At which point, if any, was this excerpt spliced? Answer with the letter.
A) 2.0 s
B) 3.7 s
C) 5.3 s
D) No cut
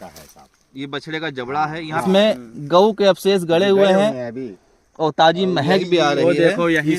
A